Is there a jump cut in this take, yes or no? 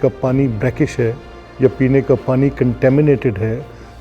no